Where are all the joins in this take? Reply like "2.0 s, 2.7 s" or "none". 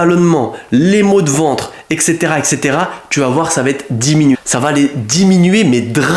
none